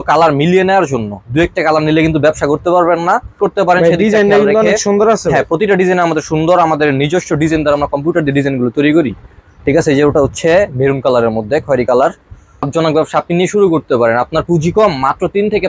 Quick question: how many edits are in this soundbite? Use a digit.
2